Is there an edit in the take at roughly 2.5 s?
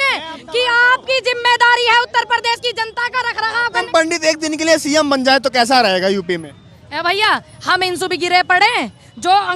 no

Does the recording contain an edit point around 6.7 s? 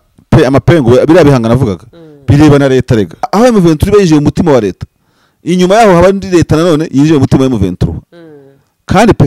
no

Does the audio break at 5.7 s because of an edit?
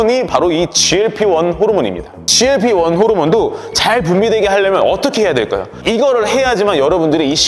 yes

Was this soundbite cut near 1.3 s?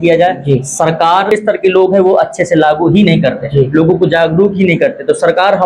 yes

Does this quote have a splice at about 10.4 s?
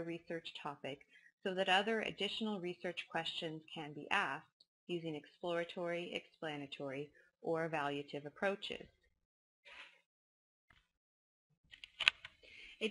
no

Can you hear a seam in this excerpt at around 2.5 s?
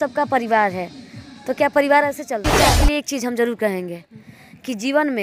yes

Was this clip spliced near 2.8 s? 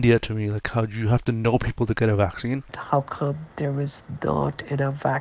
yes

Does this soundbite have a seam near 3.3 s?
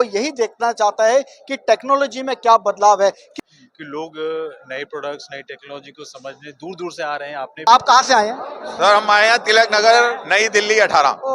yes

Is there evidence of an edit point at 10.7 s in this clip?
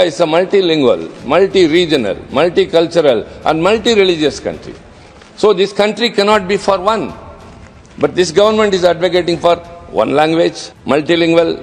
yes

